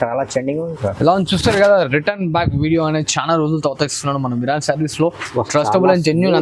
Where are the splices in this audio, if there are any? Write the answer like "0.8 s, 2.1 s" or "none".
none